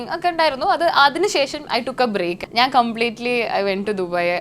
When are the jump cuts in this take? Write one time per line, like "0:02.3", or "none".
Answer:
0:02.4